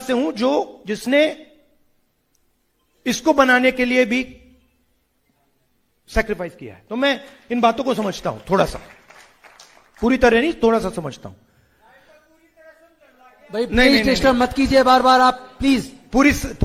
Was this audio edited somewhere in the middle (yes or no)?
no